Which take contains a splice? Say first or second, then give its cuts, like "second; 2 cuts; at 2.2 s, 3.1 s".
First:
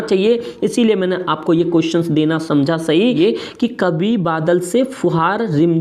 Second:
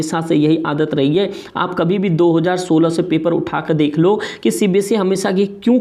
first; 1 cut; at 3.1 s